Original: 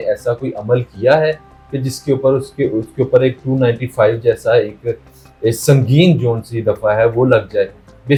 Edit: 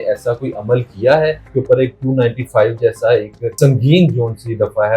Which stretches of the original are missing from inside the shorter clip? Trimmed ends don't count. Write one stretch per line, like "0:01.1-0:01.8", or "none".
0:01.4-0:02.9
0:05.0-0:05.6